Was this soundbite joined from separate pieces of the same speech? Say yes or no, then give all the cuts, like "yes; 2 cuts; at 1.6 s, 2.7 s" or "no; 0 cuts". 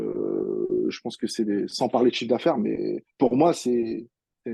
no; 0 cuts